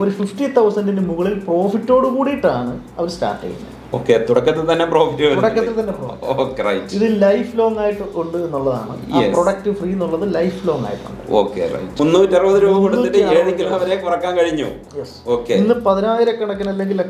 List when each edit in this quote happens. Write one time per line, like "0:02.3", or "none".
0:12.0